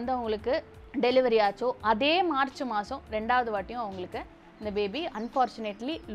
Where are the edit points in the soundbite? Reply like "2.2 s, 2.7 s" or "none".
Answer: none